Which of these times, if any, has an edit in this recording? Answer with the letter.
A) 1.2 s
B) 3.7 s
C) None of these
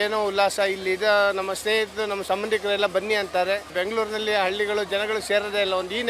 B